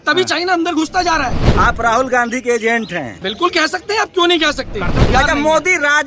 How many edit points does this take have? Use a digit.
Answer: 3